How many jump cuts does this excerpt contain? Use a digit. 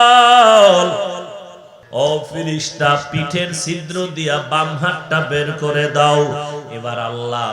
1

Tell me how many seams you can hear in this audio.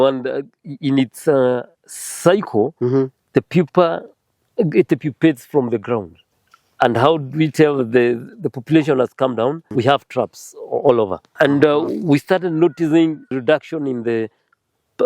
4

